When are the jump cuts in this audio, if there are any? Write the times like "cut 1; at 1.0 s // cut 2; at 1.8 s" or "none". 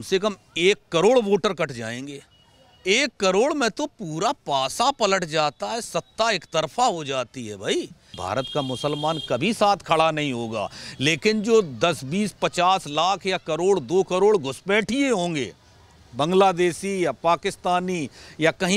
cut 1; at 8.2 s